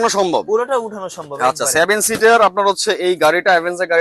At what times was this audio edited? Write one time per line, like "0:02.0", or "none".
none